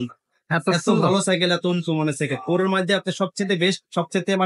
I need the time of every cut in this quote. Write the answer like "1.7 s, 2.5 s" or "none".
none